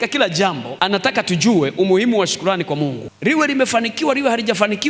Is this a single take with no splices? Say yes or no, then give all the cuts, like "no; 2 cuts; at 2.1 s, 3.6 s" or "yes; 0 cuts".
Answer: yes; 0 cuts